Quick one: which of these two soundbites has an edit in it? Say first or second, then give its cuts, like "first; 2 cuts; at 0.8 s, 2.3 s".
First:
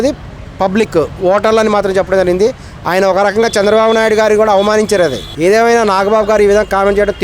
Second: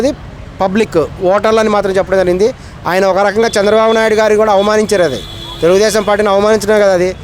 first; 1 cut; at 5.2 s